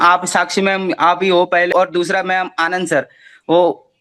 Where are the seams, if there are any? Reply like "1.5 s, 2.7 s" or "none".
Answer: 1.7 s